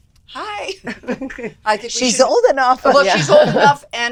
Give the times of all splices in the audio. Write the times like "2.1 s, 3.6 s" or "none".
none